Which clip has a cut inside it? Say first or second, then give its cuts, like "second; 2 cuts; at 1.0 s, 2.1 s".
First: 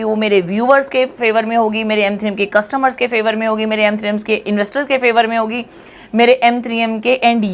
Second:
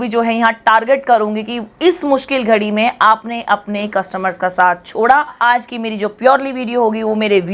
second; 1 cut; at 5.4 s